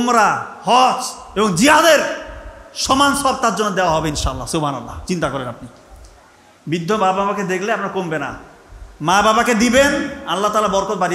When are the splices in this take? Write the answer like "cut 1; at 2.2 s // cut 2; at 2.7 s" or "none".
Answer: none